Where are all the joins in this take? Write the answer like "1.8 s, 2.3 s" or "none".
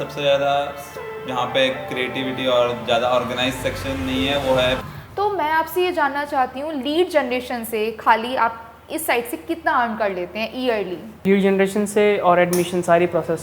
4.8 s, 11.2 s